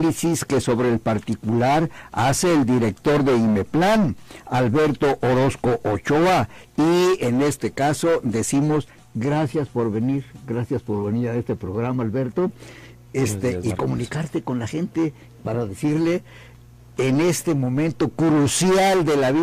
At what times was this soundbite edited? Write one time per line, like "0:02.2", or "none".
0:15.8